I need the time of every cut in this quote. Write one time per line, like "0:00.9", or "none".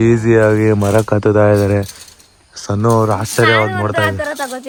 none